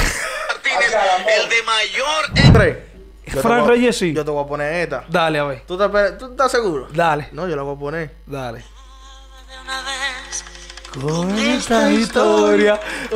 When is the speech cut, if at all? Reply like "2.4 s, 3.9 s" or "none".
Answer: 2.5 s